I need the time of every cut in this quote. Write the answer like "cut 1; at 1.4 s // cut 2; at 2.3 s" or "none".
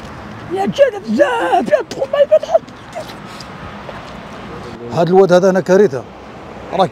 cut 1; at 4.7 s